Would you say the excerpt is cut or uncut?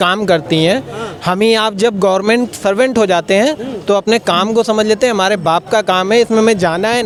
uncut